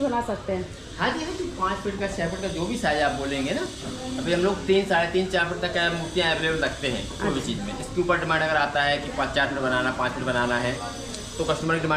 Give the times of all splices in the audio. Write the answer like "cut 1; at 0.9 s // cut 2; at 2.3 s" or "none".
none